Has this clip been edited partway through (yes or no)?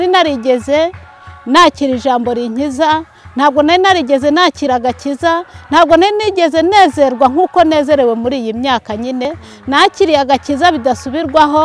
yes